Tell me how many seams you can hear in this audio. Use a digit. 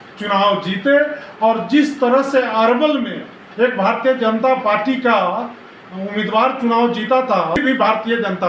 1